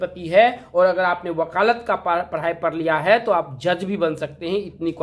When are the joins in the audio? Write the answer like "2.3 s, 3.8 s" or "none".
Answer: none